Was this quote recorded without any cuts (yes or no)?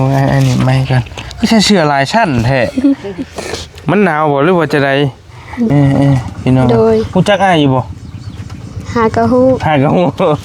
no